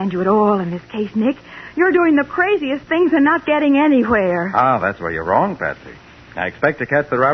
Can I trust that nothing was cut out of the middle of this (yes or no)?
yes